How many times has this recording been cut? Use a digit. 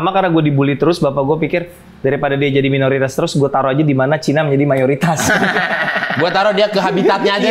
0